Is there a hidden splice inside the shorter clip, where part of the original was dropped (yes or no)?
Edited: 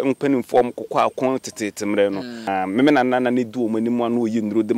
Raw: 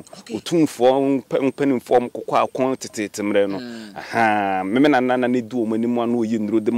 yes